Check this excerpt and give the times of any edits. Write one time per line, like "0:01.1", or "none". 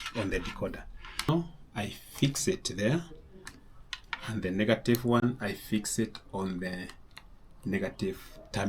0:01.3